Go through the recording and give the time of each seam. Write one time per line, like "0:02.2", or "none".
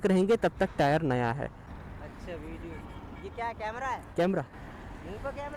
0:01.6